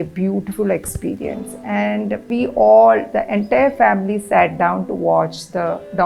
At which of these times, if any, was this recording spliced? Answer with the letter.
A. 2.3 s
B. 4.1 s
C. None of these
A